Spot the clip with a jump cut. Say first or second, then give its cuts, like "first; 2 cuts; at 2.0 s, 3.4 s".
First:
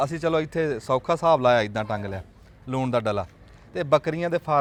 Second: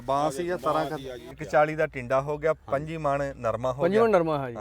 second; 1 cut; at 1.3 s